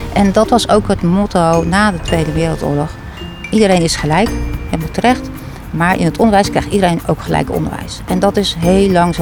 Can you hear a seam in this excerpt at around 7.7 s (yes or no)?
no